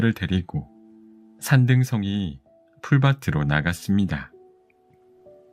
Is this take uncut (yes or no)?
no